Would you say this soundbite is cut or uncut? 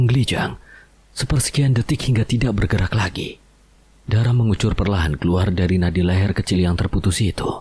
uncut